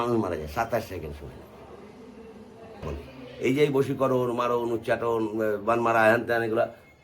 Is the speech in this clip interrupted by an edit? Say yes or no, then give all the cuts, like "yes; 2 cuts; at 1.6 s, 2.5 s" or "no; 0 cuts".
yes; 1 cut; at 2.9 s